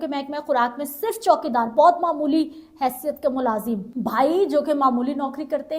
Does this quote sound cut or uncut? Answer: cut